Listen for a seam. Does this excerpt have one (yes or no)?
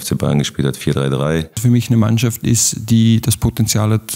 yes